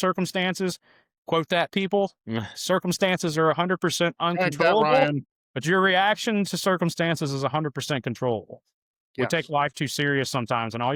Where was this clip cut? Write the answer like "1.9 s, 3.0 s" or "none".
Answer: none

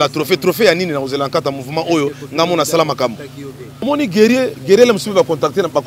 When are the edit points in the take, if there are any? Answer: 3.8 s

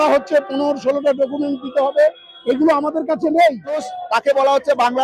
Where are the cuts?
3.8 s

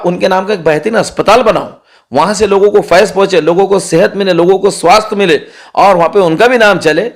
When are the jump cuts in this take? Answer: none

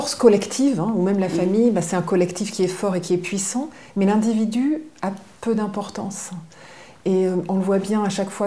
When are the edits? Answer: none

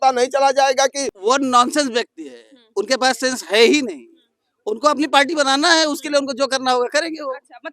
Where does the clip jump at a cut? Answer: 1.1 s

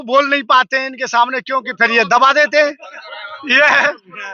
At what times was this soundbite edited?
none

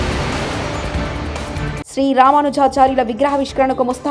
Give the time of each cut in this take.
none

